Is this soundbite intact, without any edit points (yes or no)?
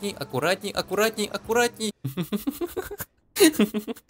no